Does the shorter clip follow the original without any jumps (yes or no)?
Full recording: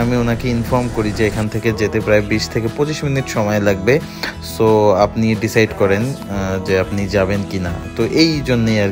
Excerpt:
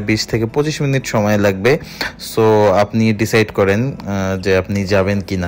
yes